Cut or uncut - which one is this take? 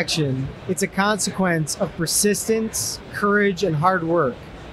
uncut